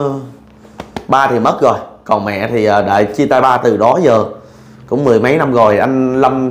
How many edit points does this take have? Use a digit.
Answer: 0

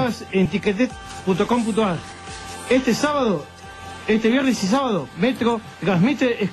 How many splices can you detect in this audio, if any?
0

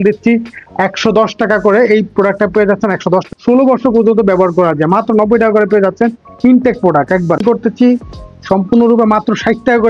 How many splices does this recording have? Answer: 2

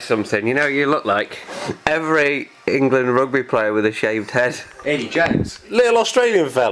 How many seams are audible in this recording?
3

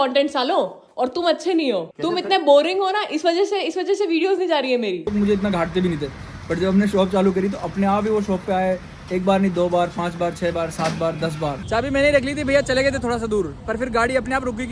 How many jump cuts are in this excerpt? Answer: 2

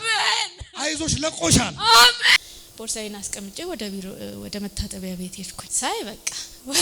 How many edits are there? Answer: 1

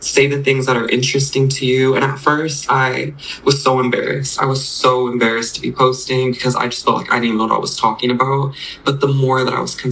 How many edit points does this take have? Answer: 0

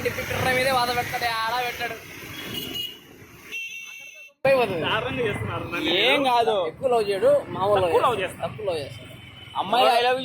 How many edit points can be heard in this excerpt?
1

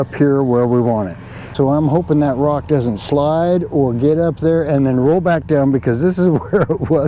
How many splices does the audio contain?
1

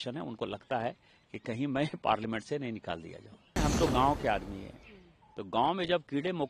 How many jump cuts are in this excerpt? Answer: 1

